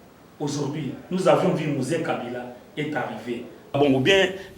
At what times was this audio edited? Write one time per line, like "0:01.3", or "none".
0:03.6

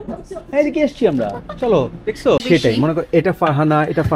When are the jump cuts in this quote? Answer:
0:02.4

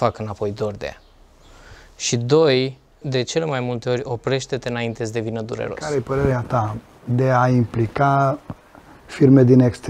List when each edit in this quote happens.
0:03.0
0:05.8

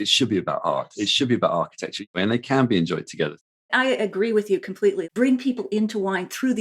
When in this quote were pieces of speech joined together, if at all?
0:02.0
0:03.5
0:05.0

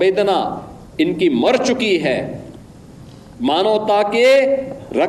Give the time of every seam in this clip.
none

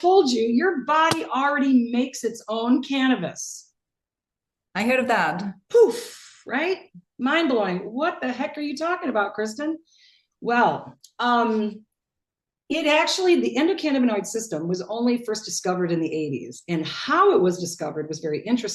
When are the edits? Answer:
none

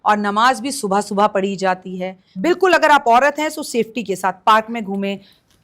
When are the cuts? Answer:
0:02.2

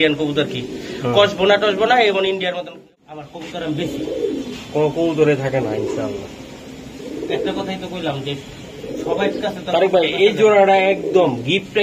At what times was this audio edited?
0:02.9

